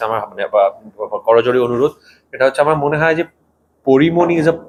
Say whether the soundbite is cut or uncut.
uncut